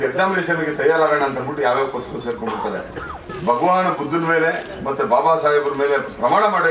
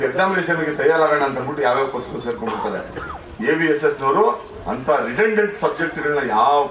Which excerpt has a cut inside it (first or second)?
first